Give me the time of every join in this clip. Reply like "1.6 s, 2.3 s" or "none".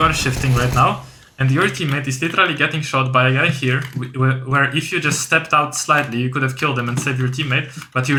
none

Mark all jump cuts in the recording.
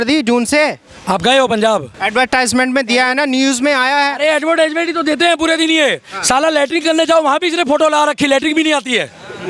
1.9 s

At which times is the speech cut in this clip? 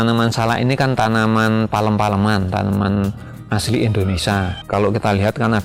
none

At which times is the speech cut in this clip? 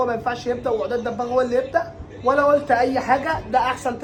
none

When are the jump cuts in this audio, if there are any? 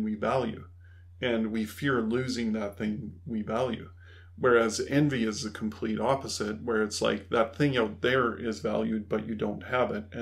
none

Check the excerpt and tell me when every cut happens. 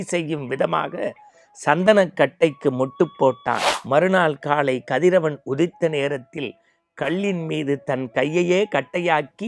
3.7 s

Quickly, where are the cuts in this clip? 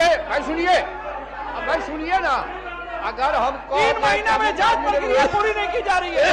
none

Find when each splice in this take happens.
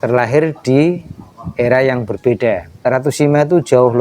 2.9 s

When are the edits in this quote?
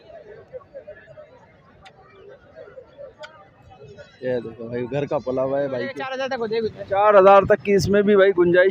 6.3 s

